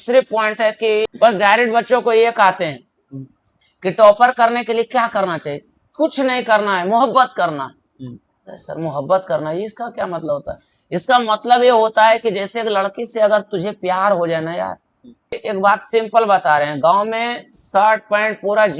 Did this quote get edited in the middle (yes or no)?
yes